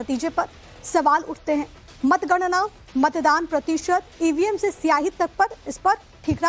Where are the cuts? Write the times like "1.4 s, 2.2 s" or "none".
none